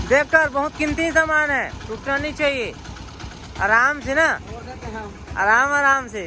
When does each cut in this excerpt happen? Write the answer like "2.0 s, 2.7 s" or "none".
none